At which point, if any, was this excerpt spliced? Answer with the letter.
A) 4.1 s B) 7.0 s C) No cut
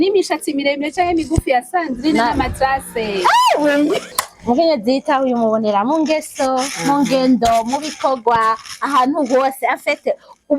A